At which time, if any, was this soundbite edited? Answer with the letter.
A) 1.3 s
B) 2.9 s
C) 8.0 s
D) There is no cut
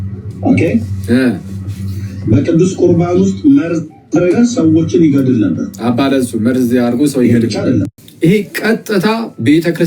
C